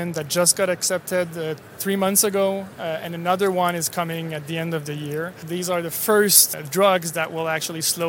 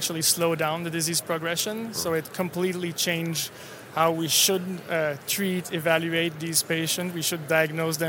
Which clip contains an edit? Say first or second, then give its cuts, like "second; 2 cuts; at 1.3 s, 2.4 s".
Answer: first; 2 cuts; at 5.4 s, 6.5 s